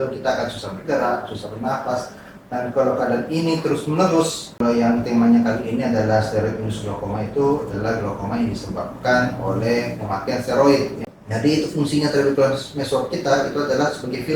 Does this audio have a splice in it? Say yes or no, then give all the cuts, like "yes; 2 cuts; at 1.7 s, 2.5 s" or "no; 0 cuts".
yes; 2 cuts; at 4.6 s, 11.1 s